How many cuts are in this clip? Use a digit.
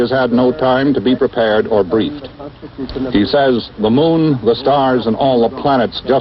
1